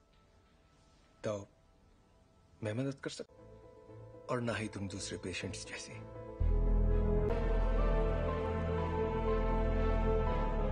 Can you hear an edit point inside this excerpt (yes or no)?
yes